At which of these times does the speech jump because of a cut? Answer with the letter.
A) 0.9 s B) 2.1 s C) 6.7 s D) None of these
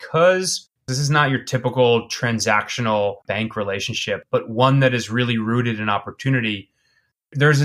A